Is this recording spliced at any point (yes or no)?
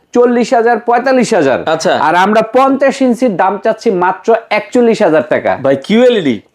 no